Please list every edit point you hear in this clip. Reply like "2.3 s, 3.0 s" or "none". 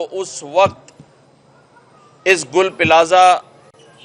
none